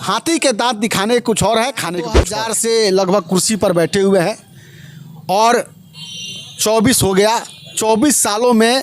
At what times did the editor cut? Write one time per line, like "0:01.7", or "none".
0:02.2